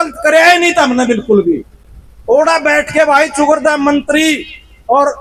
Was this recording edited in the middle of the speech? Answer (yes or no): no